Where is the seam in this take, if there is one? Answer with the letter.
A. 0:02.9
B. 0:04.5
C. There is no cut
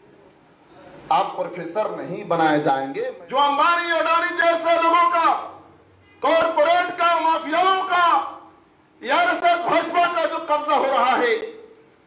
A